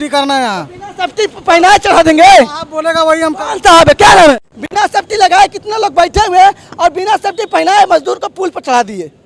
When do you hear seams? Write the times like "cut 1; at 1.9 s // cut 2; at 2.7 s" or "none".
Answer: cut 1; at 4.4 s